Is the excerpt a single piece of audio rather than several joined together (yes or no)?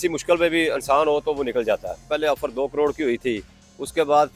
no